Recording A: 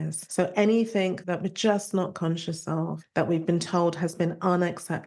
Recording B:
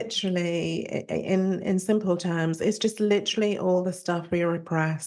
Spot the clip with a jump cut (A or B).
A